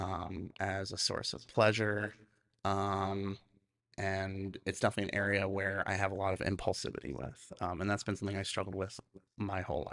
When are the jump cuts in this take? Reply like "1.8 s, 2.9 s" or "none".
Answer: none

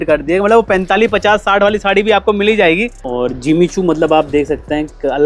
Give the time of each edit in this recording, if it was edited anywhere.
3.0 s

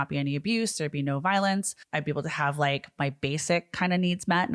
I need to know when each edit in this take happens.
none

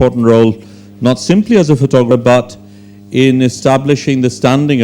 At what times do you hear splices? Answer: 2.1 s

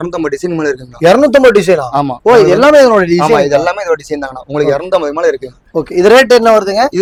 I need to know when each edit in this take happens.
none

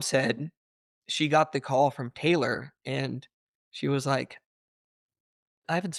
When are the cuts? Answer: none

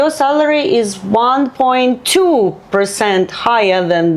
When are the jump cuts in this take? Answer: none

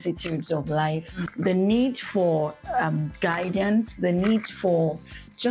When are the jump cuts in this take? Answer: 1.2 s

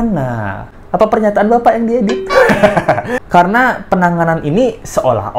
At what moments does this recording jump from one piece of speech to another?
3.1 s

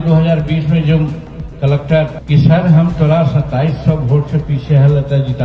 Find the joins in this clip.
2.2 s

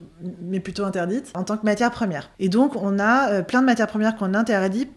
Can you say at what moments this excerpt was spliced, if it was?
1.3 s, 2.2 s

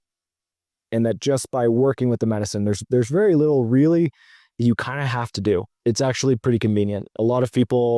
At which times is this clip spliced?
5.7 s, 7.1 s

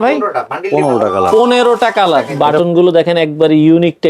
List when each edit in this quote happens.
2.3 s

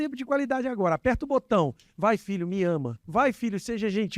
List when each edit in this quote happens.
3.0 s

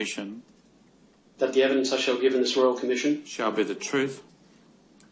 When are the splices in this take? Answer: 3.1 s

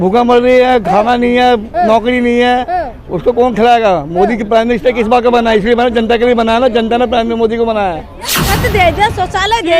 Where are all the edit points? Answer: 8.3 s

